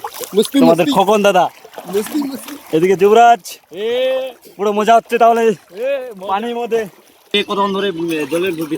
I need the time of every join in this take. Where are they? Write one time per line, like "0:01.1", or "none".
0:07.3